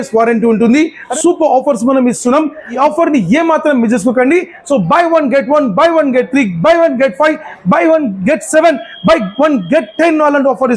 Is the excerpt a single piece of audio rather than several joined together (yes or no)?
no